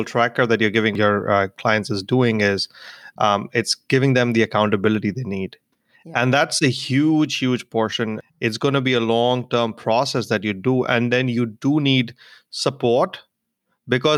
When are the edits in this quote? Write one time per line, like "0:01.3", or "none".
0:01.0
0:08.2